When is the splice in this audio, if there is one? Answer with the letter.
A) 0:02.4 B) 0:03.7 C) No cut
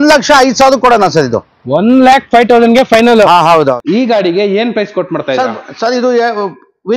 B